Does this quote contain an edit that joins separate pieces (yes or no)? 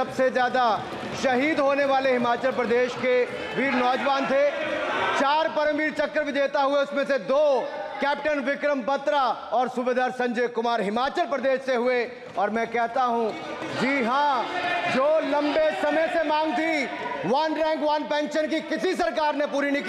no